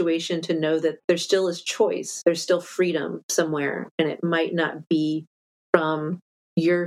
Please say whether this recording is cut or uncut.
cut